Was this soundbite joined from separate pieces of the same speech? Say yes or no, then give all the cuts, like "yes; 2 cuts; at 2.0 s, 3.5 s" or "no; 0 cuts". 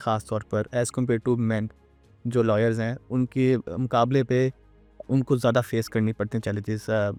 no; 0 cuts